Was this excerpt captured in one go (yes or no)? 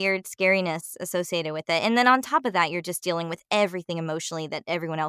yes